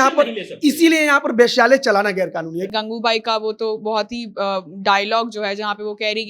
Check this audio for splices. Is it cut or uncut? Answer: cut